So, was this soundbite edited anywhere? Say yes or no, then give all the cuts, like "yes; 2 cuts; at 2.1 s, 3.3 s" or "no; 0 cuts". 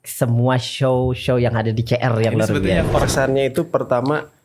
yes; 1 cut; at 3.0 s